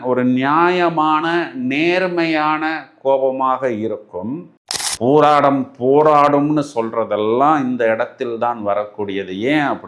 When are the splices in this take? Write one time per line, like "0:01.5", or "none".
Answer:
0:04.4